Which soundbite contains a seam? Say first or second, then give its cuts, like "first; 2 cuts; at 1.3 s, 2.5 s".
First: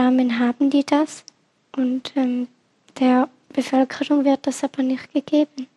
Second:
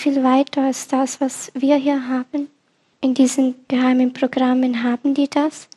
second; 1 cut; at 2.9 s